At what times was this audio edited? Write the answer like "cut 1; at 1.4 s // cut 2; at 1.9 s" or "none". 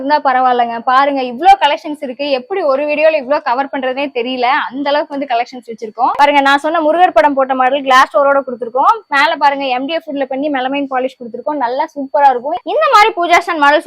cut 1; at 6.2 s // cut 2; at 12.6 s